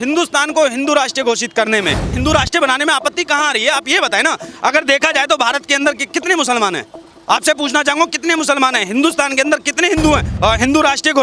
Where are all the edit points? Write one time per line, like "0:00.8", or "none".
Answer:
0:02.2
0:10.3